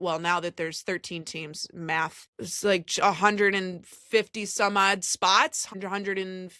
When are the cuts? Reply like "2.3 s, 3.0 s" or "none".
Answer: 2.2 s, 5.7 s